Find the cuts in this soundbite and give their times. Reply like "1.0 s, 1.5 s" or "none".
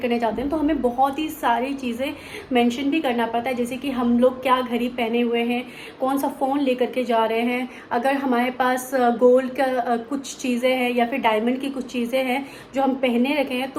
none